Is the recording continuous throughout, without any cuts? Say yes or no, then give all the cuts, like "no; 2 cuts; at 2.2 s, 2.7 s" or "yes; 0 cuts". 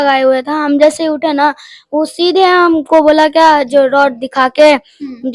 yes; 0 cuts